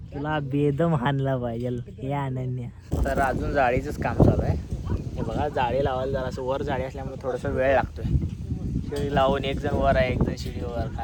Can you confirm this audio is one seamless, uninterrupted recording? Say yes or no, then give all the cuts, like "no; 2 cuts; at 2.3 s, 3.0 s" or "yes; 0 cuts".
yes; 0 cuts